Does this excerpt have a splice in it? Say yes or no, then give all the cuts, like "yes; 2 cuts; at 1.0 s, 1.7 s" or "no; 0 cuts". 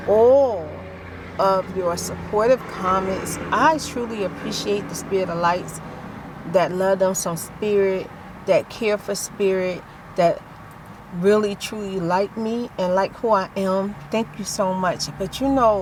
no; 0 cuts